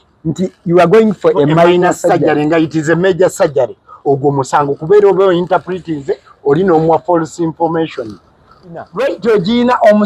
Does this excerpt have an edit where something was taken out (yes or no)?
yes